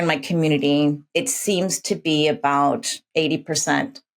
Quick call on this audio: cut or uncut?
cut